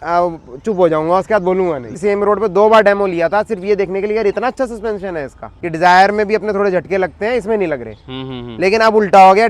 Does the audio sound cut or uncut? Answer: cut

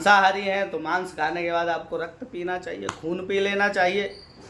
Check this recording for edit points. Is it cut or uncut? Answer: uncut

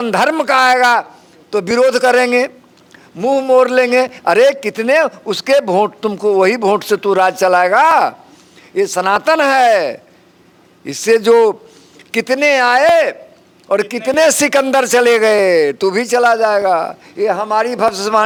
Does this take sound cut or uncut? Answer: uncut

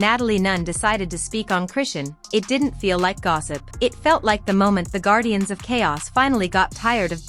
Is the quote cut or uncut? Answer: uncut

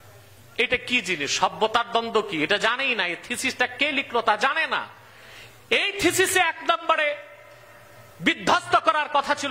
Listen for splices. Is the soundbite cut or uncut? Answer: uncut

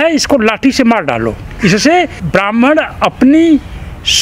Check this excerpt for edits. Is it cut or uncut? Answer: cut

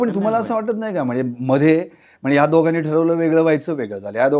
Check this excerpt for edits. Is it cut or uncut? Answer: uncut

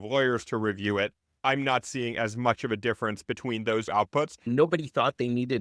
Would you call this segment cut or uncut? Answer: cut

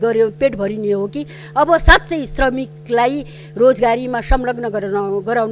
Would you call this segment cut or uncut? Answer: uncut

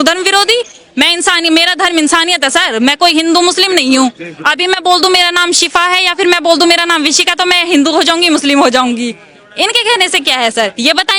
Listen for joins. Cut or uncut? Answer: uncut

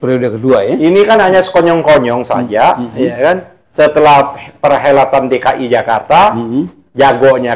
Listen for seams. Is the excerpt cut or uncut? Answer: uncut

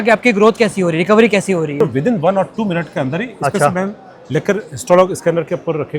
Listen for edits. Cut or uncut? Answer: cut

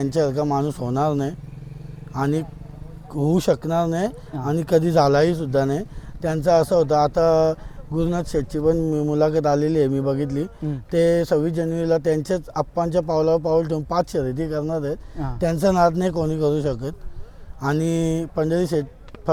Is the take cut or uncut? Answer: uncut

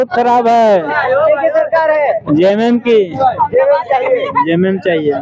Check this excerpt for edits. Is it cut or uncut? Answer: uncut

